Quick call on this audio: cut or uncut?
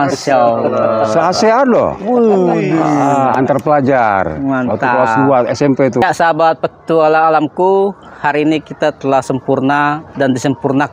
cut